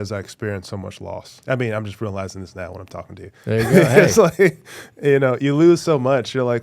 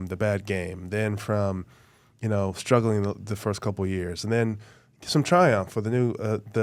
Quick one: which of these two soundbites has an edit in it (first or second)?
first